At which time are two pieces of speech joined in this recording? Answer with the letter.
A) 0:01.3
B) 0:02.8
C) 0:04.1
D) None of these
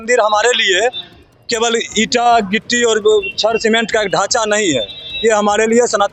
D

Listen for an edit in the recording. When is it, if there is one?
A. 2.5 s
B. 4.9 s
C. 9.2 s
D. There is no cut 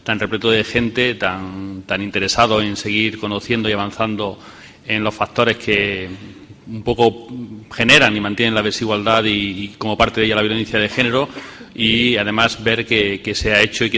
D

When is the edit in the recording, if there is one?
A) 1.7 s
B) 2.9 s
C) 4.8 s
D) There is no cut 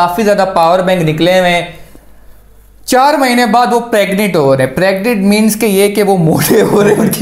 D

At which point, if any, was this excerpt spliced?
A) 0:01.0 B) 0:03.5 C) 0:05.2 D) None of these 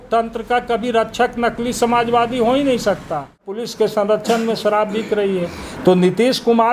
B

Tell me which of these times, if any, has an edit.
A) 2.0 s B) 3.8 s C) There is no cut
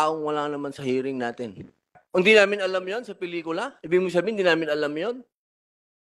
A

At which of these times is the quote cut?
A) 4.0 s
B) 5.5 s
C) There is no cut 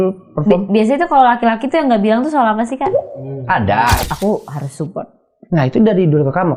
A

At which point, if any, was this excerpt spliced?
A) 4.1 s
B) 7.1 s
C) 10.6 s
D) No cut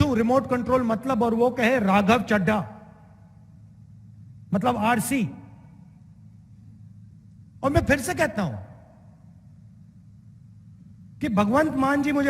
B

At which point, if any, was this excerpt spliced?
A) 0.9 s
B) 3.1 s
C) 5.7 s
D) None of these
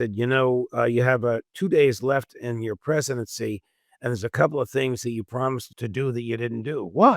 C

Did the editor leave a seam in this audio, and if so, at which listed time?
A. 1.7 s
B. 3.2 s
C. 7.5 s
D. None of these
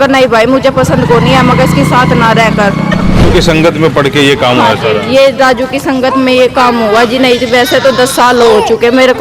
B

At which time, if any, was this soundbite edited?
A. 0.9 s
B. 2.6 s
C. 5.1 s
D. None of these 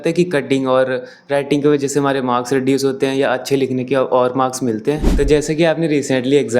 C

